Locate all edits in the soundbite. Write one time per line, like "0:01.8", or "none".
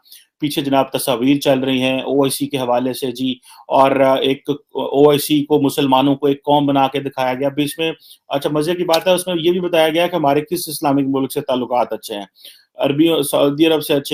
none